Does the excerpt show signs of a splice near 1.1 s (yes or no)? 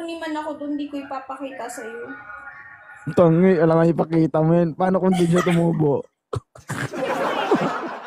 no